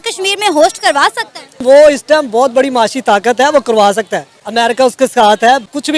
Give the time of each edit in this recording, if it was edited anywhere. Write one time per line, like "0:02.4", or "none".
none